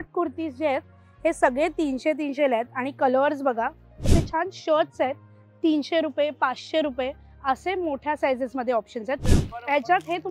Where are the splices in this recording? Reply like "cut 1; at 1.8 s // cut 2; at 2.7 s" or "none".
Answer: cut 1; at 4.1 s // cut 2; at 9.4 s

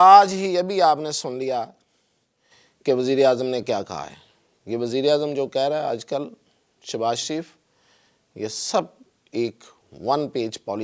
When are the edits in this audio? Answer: none

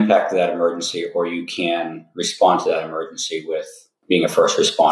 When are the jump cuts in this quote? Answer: cut 1; at 3.9 s

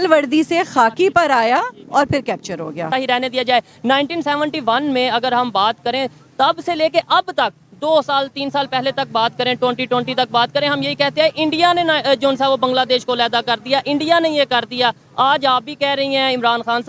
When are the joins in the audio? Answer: cut 1; at 2.9 s

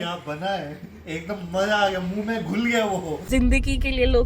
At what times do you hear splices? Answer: cut 1; at 3.2 s

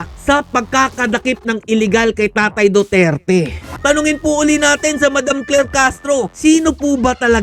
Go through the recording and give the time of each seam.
cut 1; at 3.7 s // cut 2; at 6.3 s

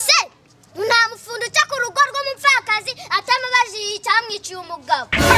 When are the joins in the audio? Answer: none

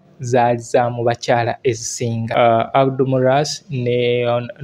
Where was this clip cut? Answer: cut 1; at 2.3 s

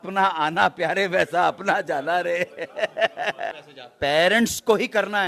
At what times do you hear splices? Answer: cut 1; at 3.7 s

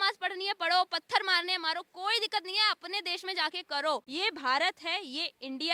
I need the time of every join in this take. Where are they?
none

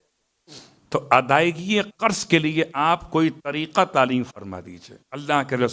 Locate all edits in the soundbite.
none

